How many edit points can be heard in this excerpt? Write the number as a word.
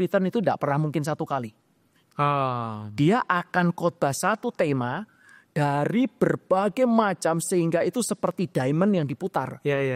zero